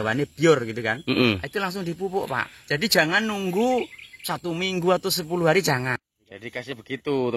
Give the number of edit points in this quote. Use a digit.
1